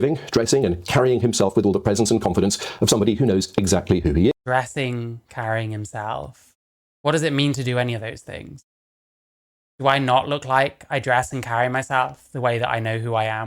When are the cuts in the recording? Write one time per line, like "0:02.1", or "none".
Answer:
none